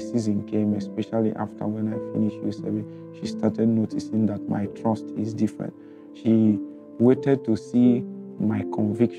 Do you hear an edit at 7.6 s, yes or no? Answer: no